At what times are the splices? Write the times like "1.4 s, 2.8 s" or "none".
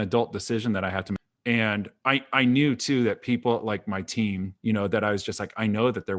1.2 s, 4.5 s